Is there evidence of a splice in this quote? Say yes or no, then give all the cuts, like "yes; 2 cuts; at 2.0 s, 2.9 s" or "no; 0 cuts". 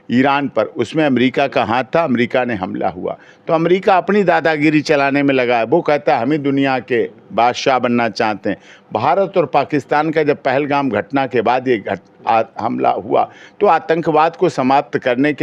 no; 0 cuts